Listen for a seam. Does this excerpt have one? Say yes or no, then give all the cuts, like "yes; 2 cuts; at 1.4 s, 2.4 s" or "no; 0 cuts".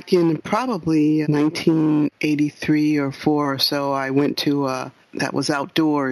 yes; 2 cuts; at 1.3 s, 4.9 s